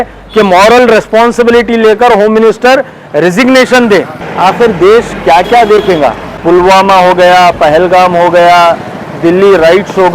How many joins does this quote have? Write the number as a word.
two